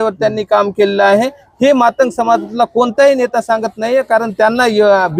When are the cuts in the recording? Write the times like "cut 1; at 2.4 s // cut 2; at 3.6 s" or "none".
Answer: none